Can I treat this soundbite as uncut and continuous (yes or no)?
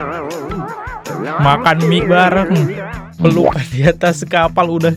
yes